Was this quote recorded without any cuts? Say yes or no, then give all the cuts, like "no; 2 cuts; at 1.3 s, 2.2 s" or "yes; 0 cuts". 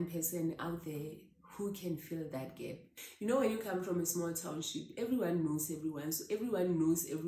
no; 1 cut; at 3.0 s